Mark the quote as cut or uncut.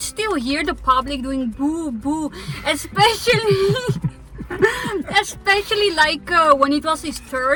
uncut